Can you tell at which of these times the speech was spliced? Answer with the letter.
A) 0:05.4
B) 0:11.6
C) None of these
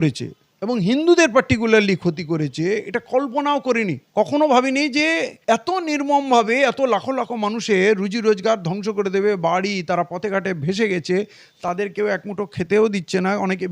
C